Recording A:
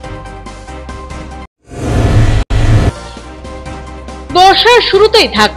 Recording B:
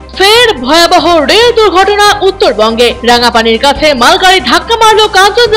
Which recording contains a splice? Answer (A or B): A